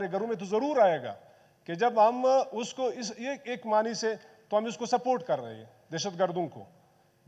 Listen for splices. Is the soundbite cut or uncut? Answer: uncut